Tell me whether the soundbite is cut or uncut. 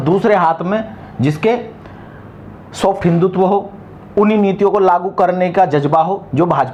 uncut